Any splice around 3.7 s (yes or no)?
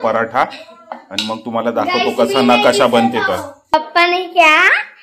yes